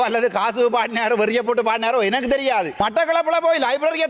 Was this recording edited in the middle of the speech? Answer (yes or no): yes